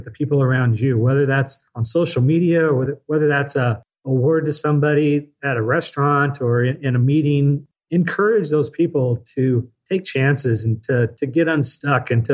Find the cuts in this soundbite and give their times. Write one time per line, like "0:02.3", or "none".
0:02.9
0:07.7